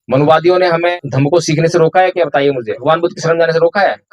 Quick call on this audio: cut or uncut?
cut